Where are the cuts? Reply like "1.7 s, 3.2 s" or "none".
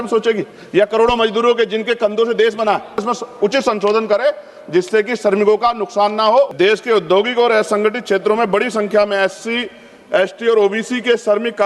3.1 s, 6.5 s